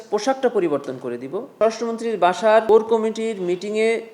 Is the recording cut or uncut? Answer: cut